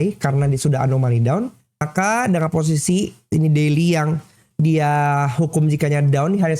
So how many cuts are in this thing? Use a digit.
1